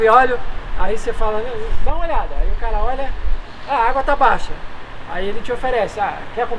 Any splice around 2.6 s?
no; 0 cuts

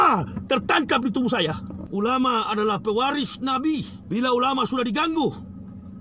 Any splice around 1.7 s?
yes; 2 cuts; at 1.7 s, 3.9 s

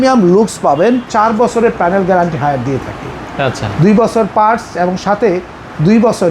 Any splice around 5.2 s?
no; 1 cut; at 1.1 s

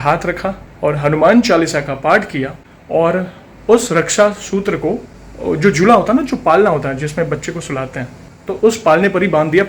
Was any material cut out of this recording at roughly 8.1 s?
yes; 1 cut; at 8.1 s

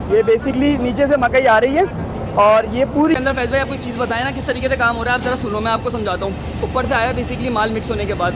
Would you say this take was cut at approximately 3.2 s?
yes; 1 cut; at 3.2 s

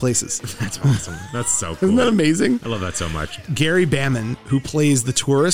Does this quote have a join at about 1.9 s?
no; 1 cut; at 3.4 s

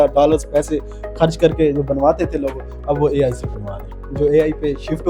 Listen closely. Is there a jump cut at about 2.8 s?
no; 1 cut; at 4.0 s

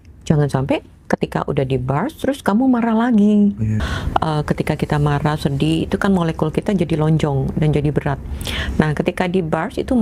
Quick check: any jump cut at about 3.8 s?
yes; 1 cut; at 3.8 s

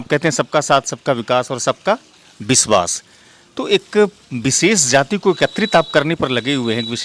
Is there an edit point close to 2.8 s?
no; 0 cuts

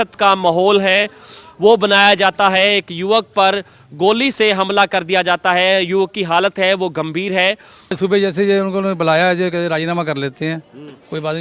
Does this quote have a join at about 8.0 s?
yes; 1 cut; at 8.0 s

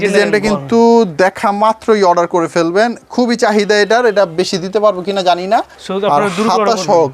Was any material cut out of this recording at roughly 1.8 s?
no; 1 cut; at 5.8 s

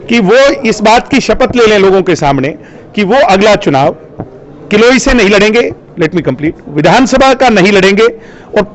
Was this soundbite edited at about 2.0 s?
no; 0 cuts

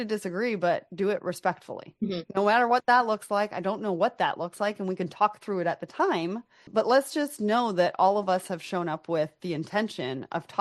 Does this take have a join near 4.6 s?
no; 1 cut; at 6.6 s

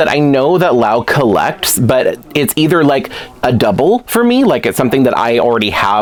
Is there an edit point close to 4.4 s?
no; 0 cuts

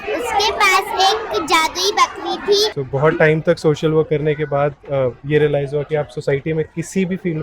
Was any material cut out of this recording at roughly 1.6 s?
no; 1 cut; at 2.8 s

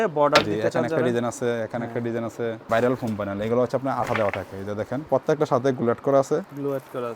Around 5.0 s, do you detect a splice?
yes; 2 cuts; at 2.6 s, 5.0 s

